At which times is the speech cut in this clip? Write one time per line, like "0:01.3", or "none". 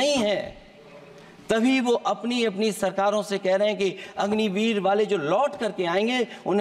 none